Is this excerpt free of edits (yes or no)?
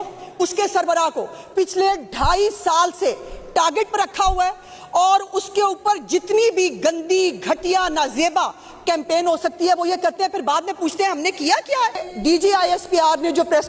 no